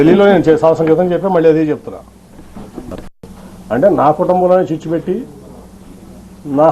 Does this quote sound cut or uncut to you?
cut